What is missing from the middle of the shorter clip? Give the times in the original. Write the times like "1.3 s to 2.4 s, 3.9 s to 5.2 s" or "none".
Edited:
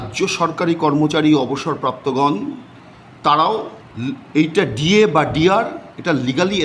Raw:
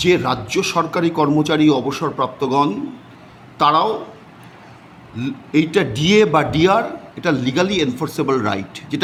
4.2 s to 5.0 s